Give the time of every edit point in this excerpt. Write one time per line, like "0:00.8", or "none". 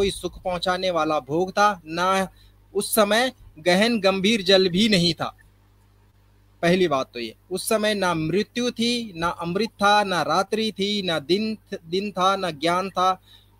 none